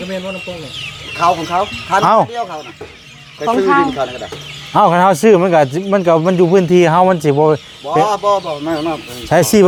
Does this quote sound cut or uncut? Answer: uncut